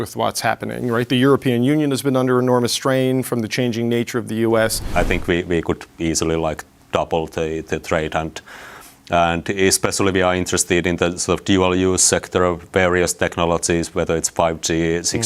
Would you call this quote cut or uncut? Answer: cut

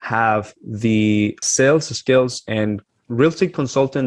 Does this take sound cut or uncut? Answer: cut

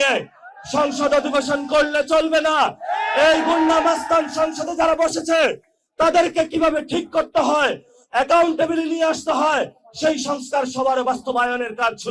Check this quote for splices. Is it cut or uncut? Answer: uncut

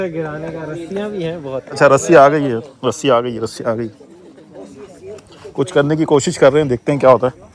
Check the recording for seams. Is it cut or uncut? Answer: uncut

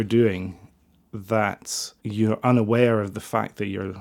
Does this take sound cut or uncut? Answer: uncut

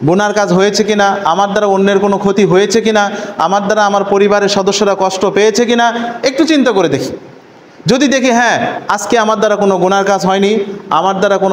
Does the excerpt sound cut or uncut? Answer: uncut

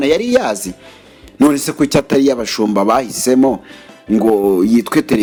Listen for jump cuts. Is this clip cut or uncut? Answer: uncut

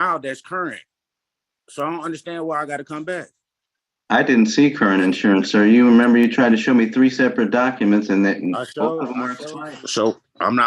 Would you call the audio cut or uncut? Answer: cut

